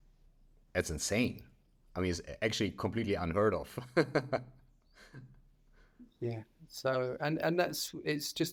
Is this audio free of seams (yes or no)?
yes